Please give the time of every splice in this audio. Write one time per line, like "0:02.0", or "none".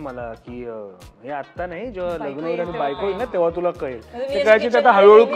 none